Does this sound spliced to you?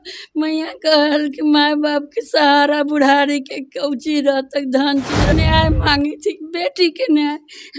yes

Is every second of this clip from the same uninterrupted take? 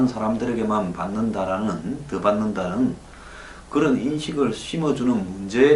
yes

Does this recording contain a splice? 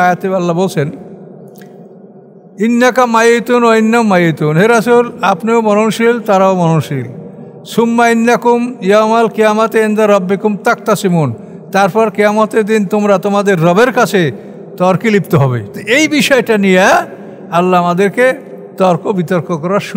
yes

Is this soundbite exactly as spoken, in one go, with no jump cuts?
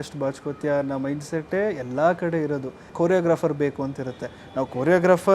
no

